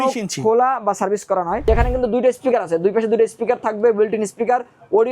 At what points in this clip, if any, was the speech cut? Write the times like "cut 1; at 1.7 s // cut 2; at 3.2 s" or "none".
cut 1; at 1.6 s